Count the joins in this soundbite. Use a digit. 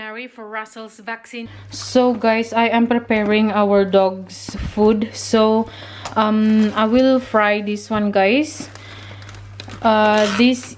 1